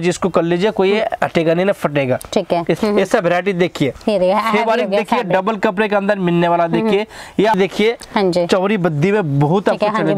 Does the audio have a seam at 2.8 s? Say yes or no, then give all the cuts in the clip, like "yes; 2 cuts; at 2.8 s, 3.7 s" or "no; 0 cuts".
yes; 2 cuts; at 2.8 s, 7.6 s